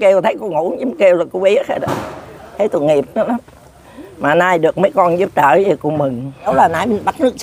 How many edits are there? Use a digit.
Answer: 1